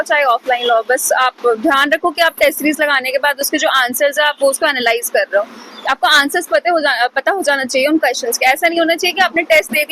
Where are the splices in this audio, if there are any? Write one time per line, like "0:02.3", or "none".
none

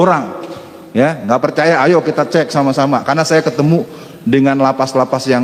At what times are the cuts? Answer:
none

